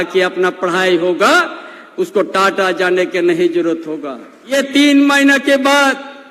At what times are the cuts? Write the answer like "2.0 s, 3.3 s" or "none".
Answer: 4.5 s